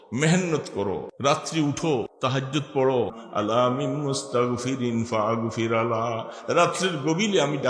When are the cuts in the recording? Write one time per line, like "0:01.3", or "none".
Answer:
0:01.1
0:02.1
0:03.2